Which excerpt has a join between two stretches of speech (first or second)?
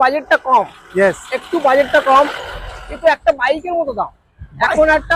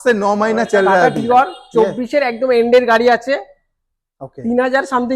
second